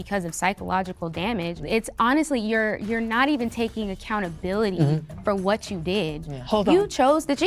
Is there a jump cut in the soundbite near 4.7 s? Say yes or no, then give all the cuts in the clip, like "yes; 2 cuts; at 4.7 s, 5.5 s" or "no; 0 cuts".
no; 2 cuts; at 1.6 s, 6.4 s